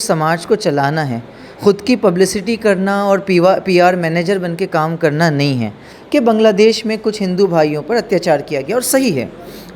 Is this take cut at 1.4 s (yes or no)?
no